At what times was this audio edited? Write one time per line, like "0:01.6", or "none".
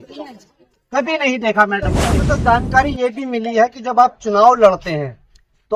0:02.2